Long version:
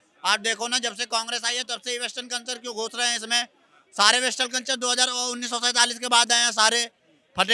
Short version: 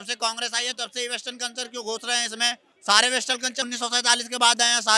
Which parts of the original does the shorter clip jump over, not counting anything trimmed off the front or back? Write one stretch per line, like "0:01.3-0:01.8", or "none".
0:03.6-0:03.8
0:04.8-0:05.4